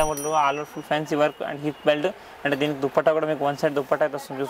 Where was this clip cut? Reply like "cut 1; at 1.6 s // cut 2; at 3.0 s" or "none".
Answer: none